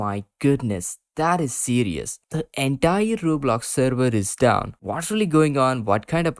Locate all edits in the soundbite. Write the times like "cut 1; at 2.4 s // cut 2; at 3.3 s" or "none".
cut 1; at 2.2 s // cut 2; at 4.7 s